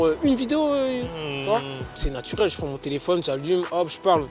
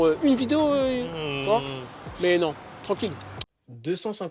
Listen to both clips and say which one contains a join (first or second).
first